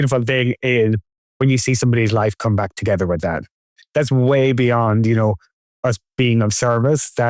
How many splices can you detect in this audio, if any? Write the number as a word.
one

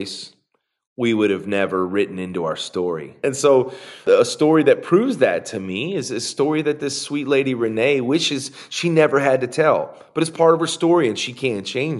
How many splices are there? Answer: one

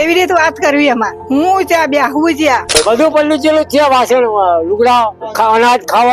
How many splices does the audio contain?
two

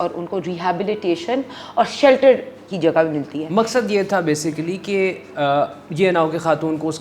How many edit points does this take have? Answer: zero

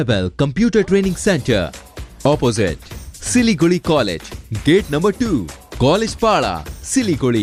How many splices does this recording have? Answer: zero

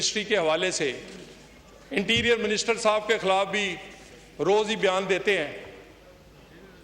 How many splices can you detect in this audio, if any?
zero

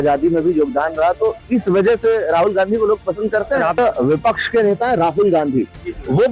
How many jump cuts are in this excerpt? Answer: one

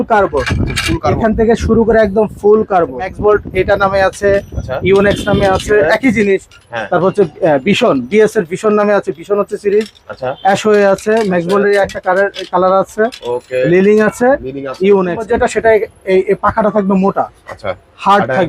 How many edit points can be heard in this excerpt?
two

